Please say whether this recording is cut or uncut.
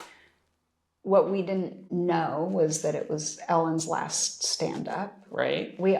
cut